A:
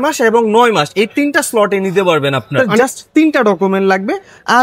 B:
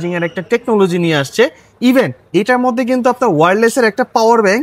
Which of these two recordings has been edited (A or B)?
A